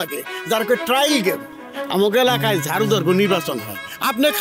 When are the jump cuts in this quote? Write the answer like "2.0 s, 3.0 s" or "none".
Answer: 1.5 s